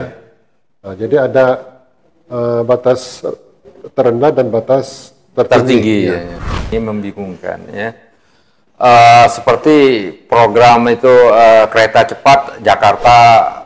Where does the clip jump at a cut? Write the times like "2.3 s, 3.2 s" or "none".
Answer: 6.7 s